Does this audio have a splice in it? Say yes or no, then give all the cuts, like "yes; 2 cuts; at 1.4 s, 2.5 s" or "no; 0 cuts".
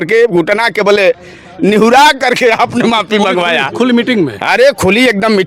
no; 0 cuts